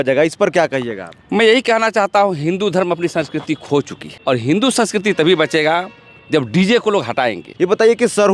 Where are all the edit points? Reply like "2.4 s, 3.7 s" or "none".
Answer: 4.0 s, 7.4 s